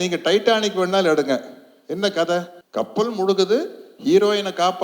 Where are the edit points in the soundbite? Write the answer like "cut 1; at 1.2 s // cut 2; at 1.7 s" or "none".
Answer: cut 1; at 2.6 s